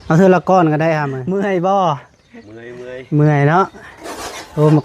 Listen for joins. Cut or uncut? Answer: cut